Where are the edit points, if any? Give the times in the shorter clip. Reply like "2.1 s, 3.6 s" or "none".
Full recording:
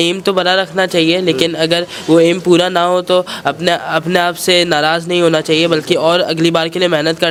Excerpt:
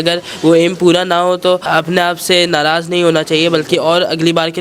1.7 s